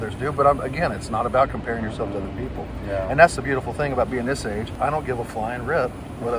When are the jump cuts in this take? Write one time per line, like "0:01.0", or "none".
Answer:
0:04.7